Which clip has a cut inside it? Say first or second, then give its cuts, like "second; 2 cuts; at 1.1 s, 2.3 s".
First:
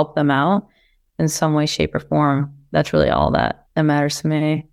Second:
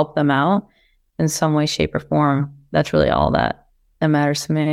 first; 1 cut; at 3.6 s